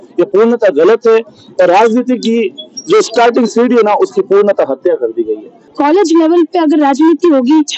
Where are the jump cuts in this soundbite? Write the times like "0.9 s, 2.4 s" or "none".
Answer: 5.6 s